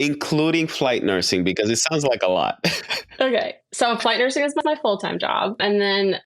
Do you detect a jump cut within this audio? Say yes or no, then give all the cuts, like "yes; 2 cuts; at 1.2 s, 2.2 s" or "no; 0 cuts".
yes; 1 cut; at 4.0 s